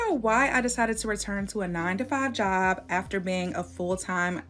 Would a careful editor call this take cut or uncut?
uncut